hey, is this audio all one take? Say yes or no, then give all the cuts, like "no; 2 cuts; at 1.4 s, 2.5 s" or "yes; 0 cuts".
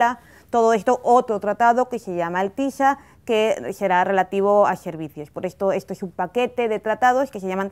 yes; 0 cuts